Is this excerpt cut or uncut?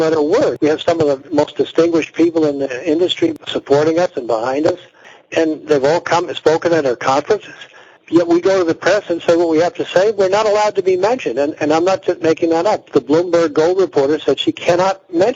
cut